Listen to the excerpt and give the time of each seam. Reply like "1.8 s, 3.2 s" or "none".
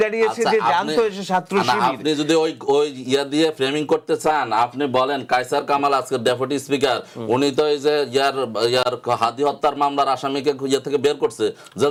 none